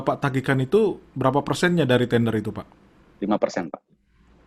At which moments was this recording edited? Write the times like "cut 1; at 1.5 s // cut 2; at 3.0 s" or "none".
none